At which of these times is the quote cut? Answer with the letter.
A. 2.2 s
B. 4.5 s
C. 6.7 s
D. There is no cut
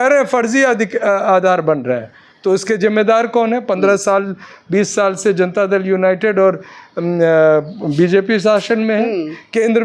D